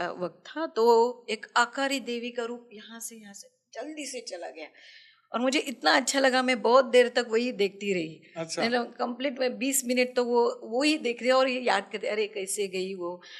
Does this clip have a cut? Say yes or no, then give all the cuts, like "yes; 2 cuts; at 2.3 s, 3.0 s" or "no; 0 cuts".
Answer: no; 0 cuts